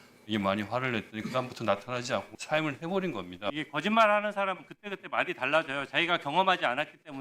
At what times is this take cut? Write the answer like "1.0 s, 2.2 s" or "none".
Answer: 2.3 s, 3.6 s

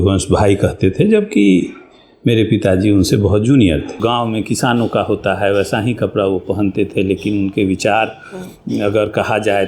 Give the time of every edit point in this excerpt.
4.0 s

